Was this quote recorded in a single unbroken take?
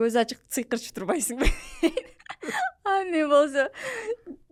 yes; 0 cuts

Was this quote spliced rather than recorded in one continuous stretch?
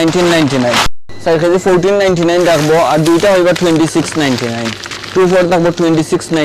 no; 0 cuts

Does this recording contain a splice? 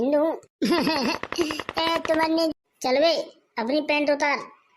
yes; 1 cut; at 2.5 s

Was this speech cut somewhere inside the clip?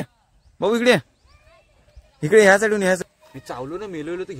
yes; 1 cut; at 3.0 s

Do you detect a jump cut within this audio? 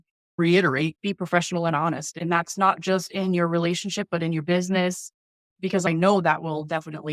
yes; 2 cuts; at 1.0 s, 5.8 s

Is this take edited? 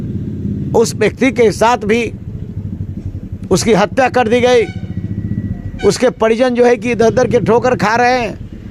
no; 0 cuts

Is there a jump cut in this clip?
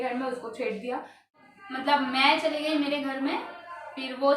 yes; 1 cut; at 1.3 s

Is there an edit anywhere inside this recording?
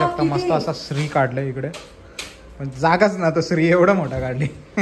no; 0 cuts

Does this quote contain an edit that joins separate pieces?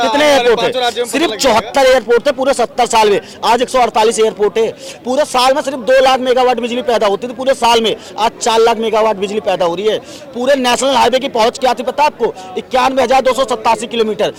no; 0 cuts

